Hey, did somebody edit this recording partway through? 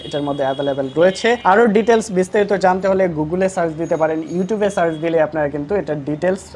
no; 0 cuts

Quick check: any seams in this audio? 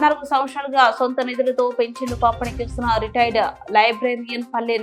no; 0 cuts

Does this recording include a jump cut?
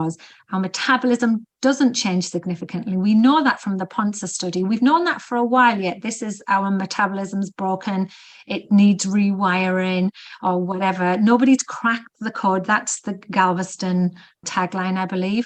no; 0 cuts

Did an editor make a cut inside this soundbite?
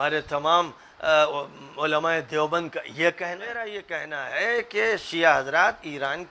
yes; 1 cut; at 3.7 s

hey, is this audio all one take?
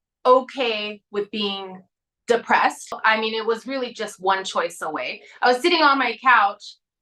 no; 1 cut; at 3.0 s

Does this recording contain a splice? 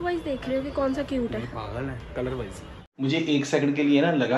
yes; 1 cut; at 2.7 s

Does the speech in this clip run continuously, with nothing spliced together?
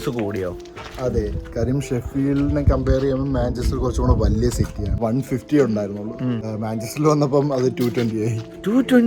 no; 2 cuts; at 5.0 s, 6.5 s

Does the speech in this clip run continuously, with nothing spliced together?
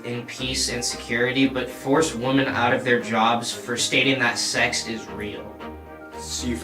no; 1 cut; at 3.8 s

